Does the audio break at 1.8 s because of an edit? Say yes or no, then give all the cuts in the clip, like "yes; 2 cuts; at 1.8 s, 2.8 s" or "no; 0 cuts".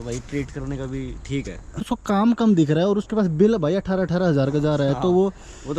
yes; 1 cut; at 1.8 s